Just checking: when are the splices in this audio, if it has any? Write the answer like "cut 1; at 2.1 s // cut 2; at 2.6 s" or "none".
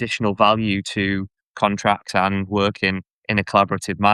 none